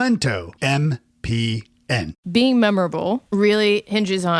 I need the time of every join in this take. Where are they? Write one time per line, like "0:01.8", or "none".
0:02.1
0:03.2